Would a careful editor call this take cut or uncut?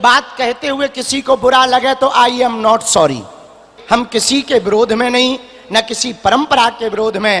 cut